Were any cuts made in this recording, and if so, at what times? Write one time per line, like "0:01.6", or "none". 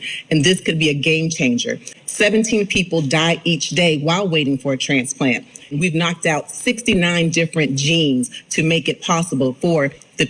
0:01.9
0:05.8